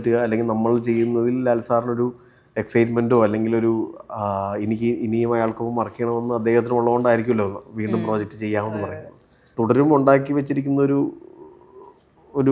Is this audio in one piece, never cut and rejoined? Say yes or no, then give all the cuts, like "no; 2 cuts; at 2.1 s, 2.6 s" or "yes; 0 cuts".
no; 1 cut; at 9.4 s